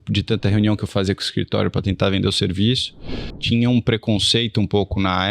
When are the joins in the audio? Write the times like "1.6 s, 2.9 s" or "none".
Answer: 3.4 s